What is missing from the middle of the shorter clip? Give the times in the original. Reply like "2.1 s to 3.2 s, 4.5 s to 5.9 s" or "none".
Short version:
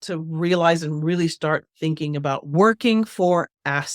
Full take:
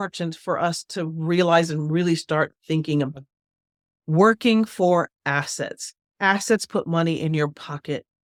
2.9 s to 3.6 s